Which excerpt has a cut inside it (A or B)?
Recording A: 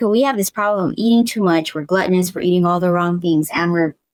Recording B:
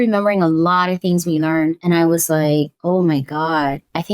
B